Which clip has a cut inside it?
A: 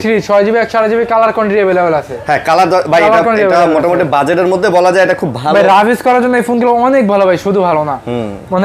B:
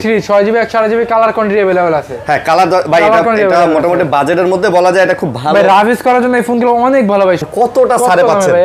B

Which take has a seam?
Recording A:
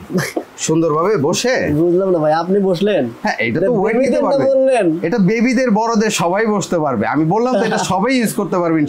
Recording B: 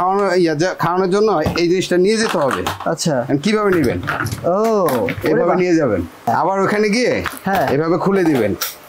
B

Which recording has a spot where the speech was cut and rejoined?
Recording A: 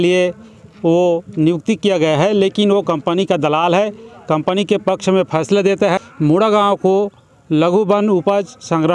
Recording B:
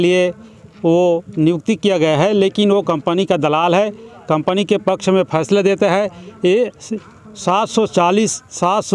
A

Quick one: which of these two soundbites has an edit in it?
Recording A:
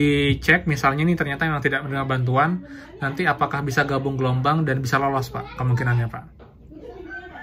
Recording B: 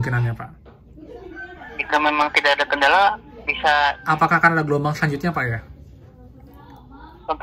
B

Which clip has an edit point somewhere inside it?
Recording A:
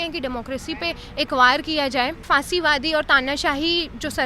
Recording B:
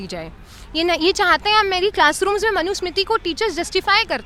A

